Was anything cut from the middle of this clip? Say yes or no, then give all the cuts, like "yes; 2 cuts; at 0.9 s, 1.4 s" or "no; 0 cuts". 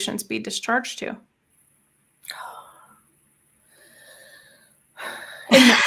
no; 0 cuts